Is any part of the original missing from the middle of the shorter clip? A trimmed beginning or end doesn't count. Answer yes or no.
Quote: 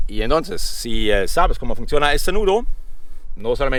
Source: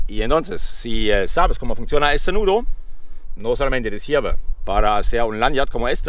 no